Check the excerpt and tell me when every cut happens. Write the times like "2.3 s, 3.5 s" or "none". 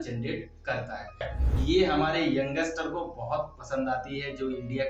1.3 s